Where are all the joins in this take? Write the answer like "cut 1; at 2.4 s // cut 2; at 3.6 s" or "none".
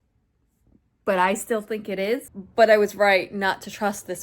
cut 1; at 2.4 s